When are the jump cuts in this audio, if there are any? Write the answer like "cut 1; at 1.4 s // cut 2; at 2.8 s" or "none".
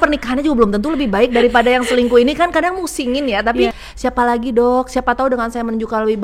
cut 1; at 3.9 s